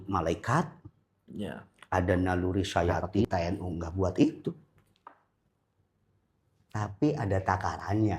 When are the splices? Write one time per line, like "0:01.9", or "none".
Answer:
0:03.2